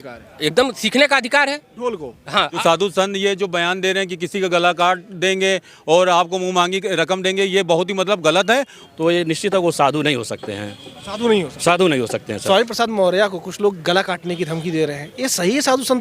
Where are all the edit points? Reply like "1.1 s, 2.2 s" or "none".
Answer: 2.6 s, 8.8 s, 12.3 s

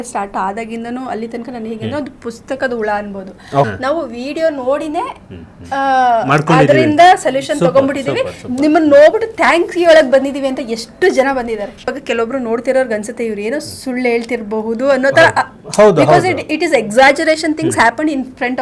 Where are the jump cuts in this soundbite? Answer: 3.7 s, 12.0 s

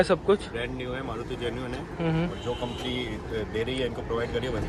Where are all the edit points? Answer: none

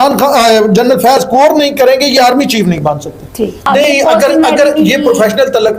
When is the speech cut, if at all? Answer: 3.7 s

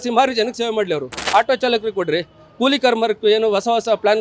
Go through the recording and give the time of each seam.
1.1 s

